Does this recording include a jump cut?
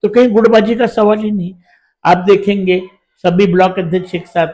no; 0 cuts

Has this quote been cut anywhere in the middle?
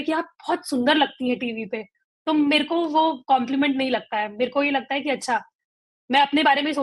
no; 0 cuts

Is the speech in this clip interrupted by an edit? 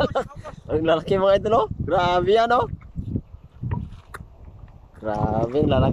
no; 0 cuts

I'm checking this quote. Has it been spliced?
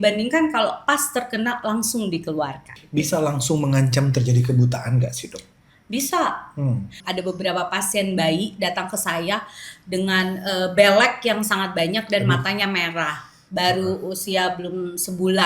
yes; 2 cuts; at 2.6 s, 7.0 s

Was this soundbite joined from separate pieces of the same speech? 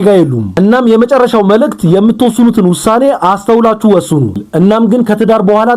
yes; 1 cut; at 4.4 s

